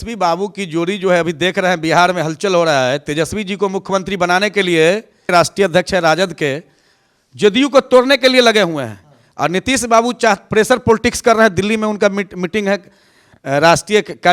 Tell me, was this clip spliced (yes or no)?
no